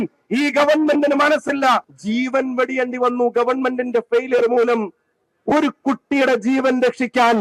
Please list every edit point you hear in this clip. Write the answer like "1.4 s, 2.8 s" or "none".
1.9 s